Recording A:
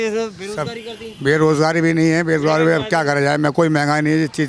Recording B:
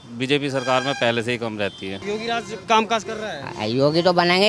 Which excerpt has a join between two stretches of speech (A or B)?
B